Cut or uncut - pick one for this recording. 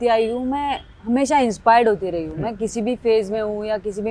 uncut